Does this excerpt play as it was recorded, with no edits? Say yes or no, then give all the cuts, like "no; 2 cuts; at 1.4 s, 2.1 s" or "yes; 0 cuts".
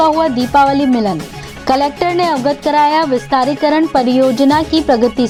yes; 0 cuts